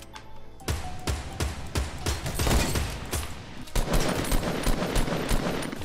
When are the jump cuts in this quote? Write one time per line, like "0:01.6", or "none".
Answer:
0:03.6